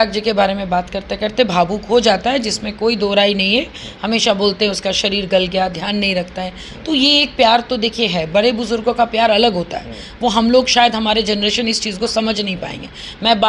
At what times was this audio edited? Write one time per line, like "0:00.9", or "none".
none